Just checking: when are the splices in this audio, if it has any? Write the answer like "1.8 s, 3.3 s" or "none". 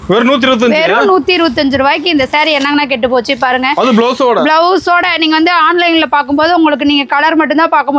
none